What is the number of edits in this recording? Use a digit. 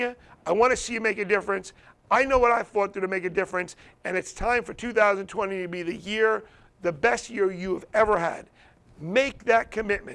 0